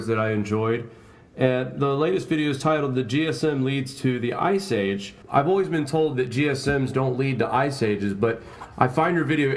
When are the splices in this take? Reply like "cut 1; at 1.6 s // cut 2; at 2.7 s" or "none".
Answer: none